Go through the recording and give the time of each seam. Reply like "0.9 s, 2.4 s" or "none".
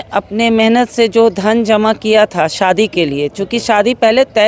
none